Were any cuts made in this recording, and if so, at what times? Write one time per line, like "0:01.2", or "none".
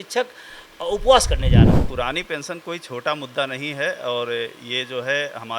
0:01.8